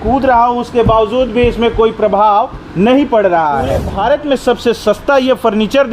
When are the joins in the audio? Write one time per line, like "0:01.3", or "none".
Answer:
0:03.9